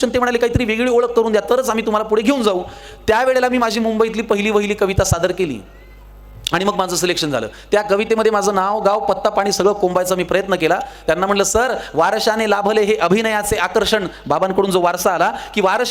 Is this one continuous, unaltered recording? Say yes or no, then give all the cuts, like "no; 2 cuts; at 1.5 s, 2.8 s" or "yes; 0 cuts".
yes; 0 cuts